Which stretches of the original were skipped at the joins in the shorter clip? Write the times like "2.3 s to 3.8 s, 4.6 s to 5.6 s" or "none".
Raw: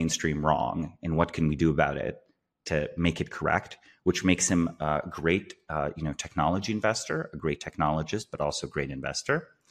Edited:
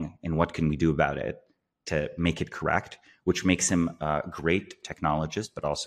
5.6 s to 7.6 s